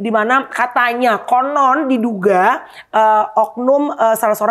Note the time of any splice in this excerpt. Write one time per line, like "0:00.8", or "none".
none